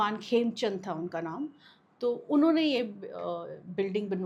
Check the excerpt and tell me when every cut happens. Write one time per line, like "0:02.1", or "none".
none